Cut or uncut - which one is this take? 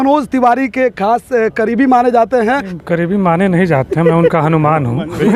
cut